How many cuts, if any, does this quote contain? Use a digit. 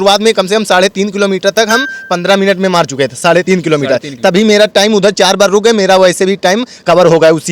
0